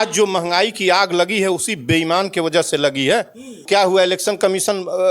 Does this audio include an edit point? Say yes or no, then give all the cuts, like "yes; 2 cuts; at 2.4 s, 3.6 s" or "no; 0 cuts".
yes; 1 cut; at 3.6 s